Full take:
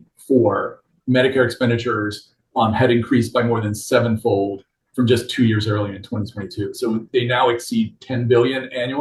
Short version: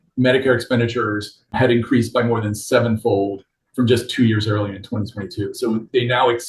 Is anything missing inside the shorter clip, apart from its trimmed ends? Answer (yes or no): yes